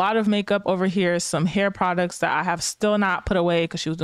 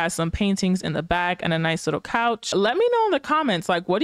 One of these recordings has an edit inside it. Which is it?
second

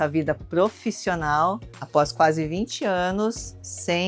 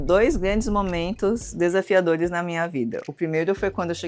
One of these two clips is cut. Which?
first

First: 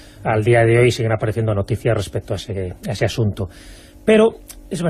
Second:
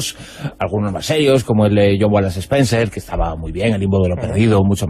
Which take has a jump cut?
second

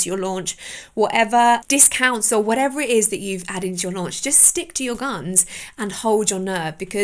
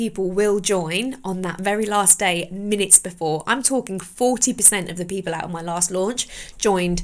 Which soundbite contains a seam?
first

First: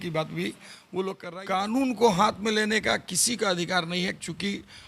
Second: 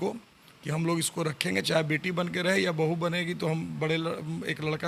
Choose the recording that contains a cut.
first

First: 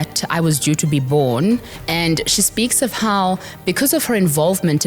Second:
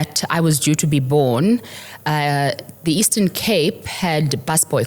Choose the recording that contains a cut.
first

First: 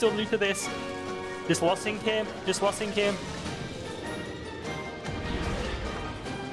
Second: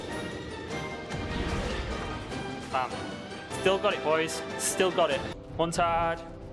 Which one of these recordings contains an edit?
second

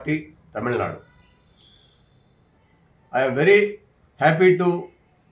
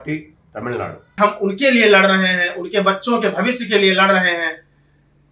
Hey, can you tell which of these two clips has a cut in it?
second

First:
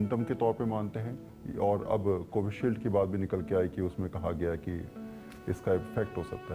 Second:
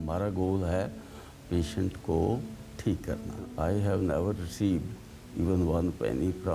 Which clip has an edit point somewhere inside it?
second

